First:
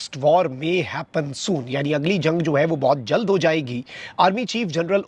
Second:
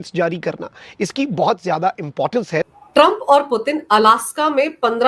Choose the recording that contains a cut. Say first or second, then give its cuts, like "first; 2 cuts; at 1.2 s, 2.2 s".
second; 1 cut; at 2.7 s